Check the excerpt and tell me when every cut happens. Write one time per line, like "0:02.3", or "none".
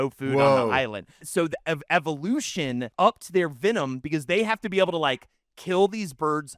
0:01.2
0:02.9